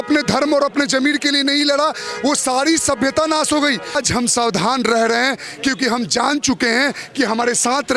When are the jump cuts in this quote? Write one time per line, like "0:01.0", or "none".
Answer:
0:04.0